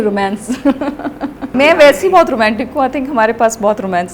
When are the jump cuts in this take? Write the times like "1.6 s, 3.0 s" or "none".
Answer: 1.4 s